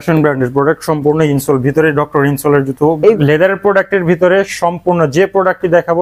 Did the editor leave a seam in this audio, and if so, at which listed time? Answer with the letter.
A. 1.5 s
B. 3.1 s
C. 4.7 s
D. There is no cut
B